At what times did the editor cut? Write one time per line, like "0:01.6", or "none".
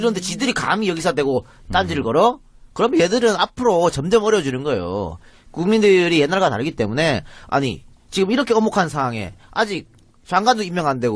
0:00.9